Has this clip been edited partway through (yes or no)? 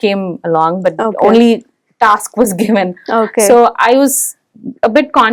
no